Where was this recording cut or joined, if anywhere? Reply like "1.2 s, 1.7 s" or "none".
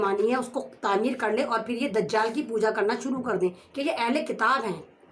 3.7 s